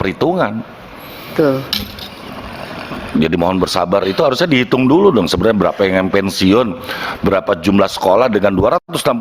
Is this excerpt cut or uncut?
uncut